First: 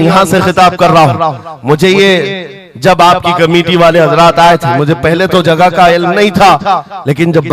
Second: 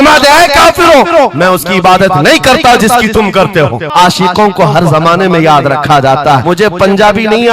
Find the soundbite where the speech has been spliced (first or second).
second